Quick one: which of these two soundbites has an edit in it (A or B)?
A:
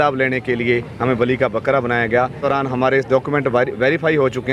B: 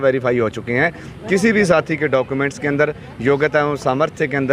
A